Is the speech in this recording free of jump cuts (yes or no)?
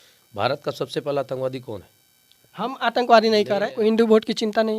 no